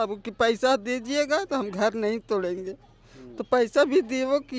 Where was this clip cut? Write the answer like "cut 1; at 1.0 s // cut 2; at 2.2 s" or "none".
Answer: none